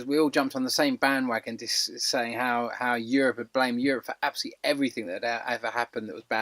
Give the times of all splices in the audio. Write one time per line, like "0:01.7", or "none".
none